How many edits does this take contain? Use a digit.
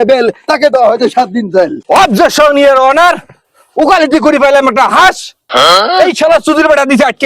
1